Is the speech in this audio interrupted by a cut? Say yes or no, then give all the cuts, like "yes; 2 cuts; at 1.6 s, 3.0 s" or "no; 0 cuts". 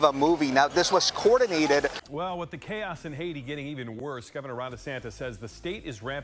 yes; 1 cut; at 2.0 s